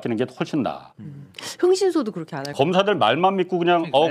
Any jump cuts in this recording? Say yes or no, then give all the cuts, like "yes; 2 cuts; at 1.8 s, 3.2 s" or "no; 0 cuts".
yes; 1 cut; at 2.4 s